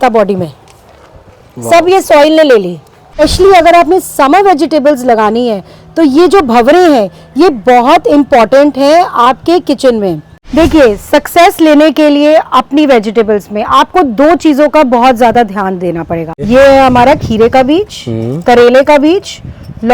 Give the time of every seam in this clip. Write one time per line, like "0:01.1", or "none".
0:03.2
0:10.3
0:16.4